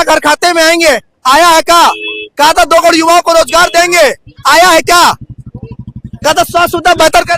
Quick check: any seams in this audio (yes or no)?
no